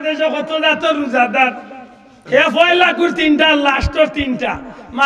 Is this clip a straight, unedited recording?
yes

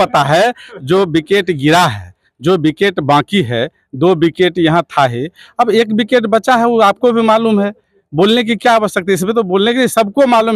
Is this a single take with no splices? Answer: yes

